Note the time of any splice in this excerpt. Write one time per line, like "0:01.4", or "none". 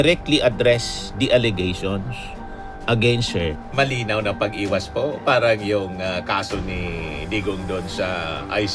0:03.6